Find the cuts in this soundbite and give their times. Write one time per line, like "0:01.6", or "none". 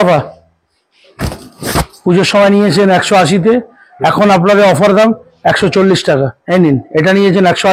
0:06.4